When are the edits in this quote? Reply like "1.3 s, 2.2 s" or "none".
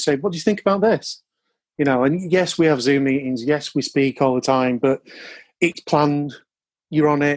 none